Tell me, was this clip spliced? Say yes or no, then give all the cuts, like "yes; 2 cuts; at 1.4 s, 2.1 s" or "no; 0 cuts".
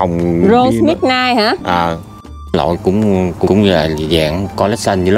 yes; 2 cuts; at 2.2 s, 3.5 s